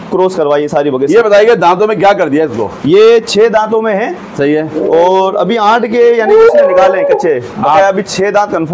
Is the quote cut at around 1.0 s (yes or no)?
no